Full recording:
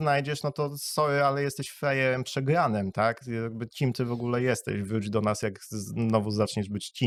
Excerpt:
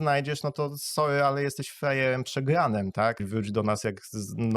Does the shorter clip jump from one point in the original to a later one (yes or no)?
yes